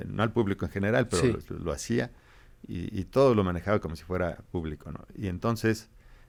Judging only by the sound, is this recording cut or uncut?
uncut